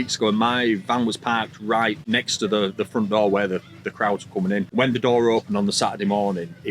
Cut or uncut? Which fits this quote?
cut